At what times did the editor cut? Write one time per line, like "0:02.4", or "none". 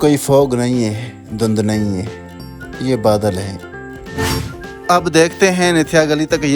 0:04.2